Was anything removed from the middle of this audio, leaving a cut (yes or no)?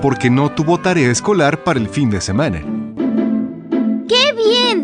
no